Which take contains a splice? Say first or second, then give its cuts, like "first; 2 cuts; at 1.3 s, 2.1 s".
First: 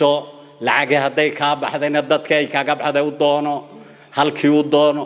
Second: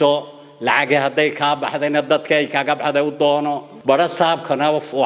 second; 1 cut; at 3.7 s